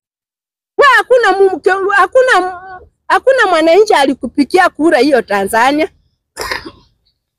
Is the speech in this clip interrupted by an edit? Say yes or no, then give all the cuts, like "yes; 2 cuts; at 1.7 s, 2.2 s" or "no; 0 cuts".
no; 0 cuts